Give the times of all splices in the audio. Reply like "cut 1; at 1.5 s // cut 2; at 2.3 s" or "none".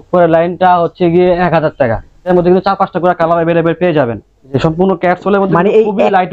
cut 1; at 2.3 s